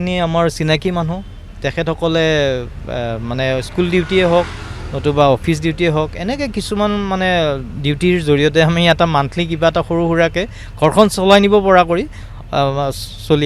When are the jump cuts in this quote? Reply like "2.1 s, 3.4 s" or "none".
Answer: none

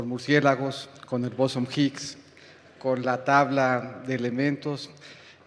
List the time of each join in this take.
3.9 s

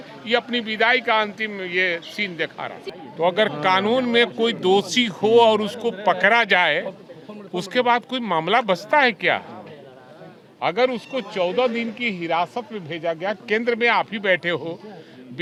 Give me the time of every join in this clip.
none

